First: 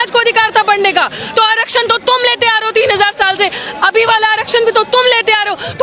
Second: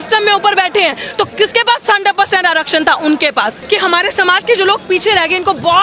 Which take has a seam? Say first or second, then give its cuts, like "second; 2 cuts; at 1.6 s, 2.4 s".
second; 1 cut; at 3.6 s